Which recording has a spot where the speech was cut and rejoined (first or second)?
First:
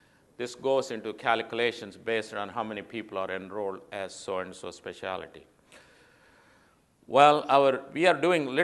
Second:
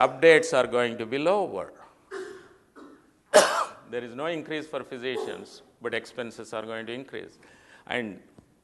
first